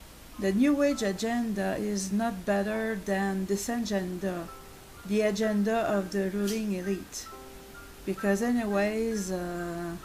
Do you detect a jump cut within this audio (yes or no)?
yes